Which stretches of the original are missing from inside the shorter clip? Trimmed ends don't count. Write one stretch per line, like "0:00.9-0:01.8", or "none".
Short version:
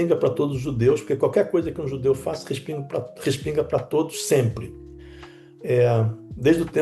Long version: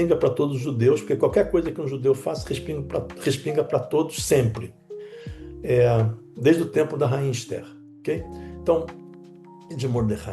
none